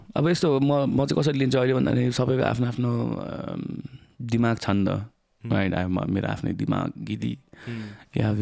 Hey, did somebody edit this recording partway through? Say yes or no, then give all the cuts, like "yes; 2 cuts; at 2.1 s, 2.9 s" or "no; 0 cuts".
no; 0 cuts